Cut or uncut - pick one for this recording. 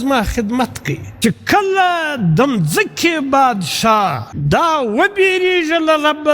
cut